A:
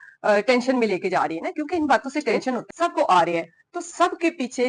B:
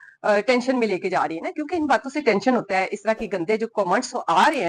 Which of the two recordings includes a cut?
A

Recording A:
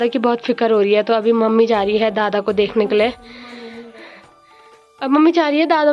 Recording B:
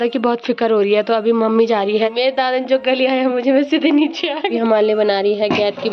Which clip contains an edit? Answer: B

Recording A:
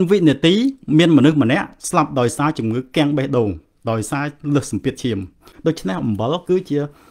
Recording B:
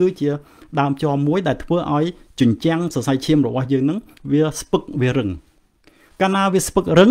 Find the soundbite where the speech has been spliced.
A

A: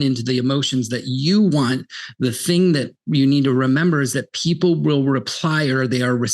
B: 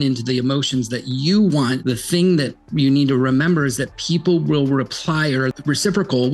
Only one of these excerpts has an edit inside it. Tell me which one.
B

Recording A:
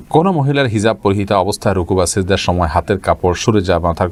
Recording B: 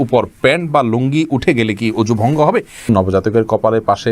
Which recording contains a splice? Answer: B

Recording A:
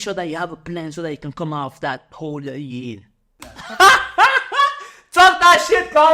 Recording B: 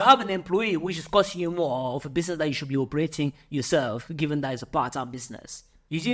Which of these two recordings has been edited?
A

